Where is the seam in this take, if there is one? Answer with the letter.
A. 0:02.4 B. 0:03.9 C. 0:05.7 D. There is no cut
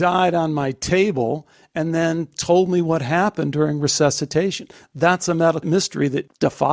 C